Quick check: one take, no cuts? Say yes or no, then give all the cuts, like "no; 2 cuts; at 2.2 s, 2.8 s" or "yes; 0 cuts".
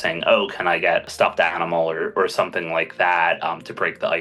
no; 1 cut; at 1.1 s